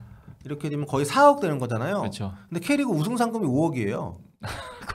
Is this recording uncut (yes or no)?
yes